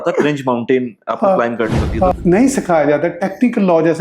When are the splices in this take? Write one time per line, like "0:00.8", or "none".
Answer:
0:02.2